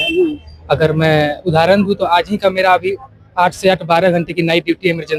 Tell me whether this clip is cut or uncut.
uncut